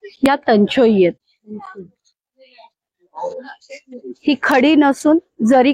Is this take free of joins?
no; 1 cut; at 1.3 s

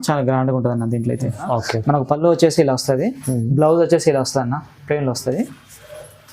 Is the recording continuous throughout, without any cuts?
no; 1 cut; at 1.4 s

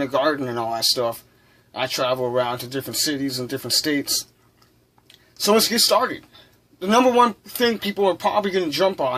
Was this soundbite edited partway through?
yes; 1 cut; at 6.1 s

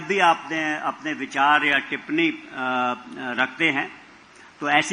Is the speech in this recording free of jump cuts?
yes; 0 cuts

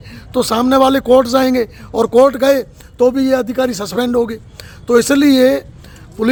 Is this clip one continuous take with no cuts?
yes; 0 cuts

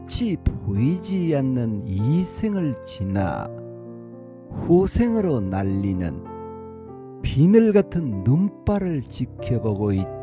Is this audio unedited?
no; 2 cuts; at 6.1 s, 7.4 s

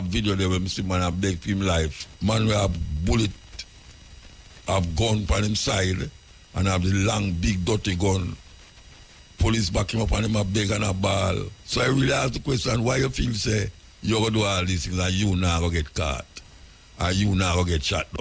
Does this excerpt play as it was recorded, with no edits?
no; 2 cuts; at 2.0 s, 11.6 s

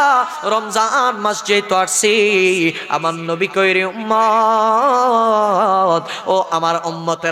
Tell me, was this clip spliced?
no; 0 cuts

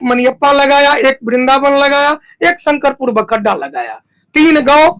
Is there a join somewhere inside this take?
no; 0 cuts

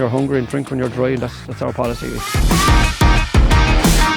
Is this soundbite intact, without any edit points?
no; 1 cut; at 2.3 s

